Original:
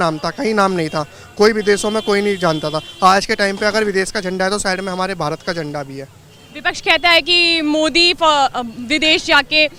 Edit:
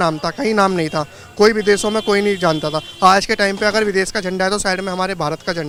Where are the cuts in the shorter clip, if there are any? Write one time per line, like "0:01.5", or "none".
none